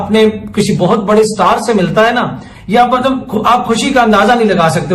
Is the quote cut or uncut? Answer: cut